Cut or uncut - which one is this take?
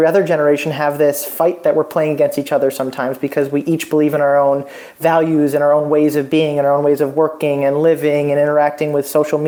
uncut